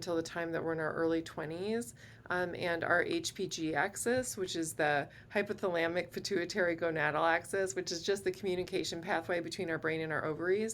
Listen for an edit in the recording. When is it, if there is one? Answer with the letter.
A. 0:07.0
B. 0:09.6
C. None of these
C